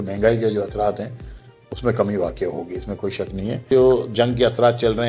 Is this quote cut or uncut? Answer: cut